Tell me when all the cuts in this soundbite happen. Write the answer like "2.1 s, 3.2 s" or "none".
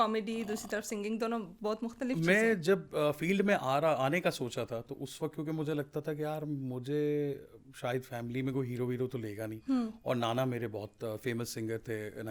none